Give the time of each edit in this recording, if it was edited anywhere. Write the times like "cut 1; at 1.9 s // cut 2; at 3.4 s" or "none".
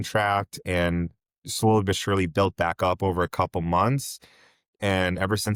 none